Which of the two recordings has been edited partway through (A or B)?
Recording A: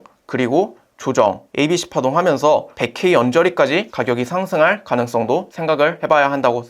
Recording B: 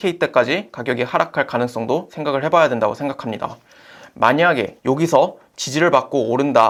A